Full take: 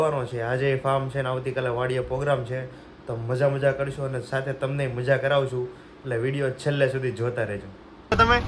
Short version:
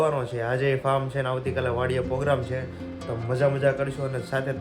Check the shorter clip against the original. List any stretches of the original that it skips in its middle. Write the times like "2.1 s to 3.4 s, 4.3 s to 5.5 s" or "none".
none